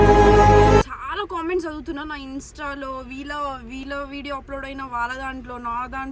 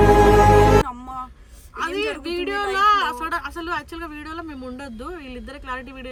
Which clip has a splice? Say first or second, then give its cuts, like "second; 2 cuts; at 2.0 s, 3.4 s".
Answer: first; 1 cut; at 0.9 s